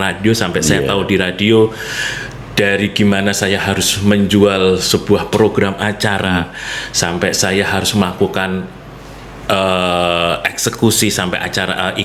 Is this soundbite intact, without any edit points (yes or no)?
yes